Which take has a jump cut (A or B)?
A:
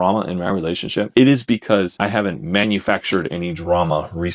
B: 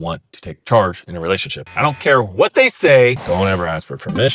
B